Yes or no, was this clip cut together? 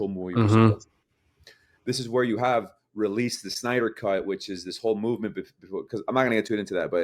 no